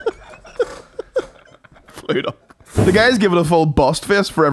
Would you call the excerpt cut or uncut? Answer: cut